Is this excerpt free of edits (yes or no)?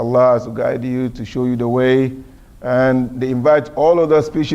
no